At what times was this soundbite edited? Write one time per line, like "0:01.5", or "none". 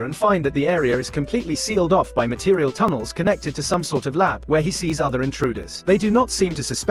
none